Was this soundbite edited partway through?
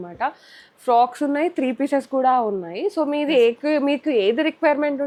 no; 0 cuts

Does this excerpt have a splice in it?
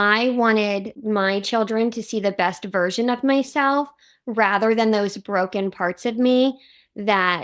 yes; 1 cut; at 0.9 s

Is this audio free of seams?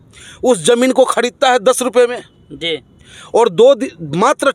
yes; 0 cuts

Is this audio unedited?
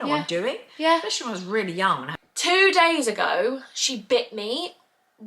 no; 1 cut; at 2.1 s

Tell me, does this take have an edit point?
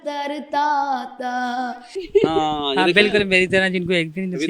yes; 1 cut; at 1.9 s

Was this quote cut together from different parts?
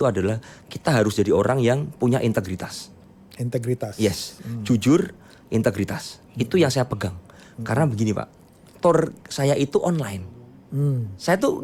no; 0 cuts

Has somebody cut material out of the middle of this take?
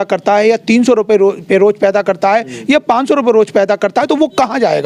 no; 0 cuts

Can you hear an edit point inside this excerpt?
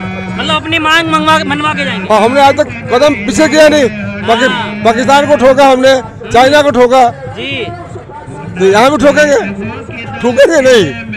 no; 0 cuts

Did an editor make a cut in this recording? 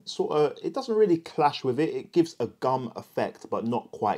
no; 0 cuts

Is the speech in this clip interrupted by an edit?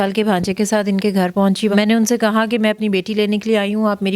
yes; 1 cut; at 1.7 s

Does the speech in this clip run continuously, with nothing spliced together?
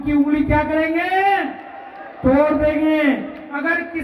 yes; 0 cuts

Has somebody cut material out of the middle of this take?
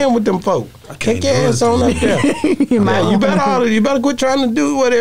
no; 0 cuts

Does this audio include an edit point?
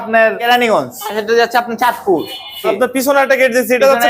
yes; 2 cuts; at 1.2 s, 2.7 s

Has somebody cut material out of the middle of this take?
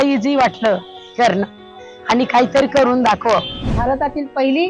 yes; 1 cut; at 3.6 s

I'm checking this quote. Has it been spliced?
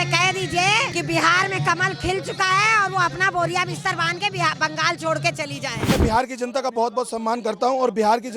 yes; 2 cuts; at 0.9 s, 5.9 s

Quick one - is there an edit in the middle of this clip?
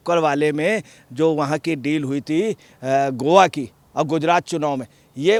no; 0 cuts

